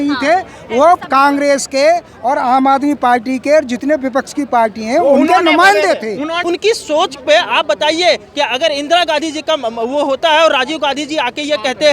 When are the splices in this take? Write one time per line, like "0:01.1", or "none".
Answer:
0:06.3